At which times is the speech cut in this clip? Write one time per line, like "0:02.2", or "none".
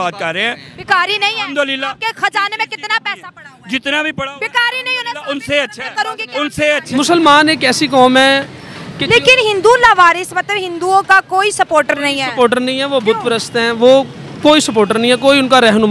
0:06.8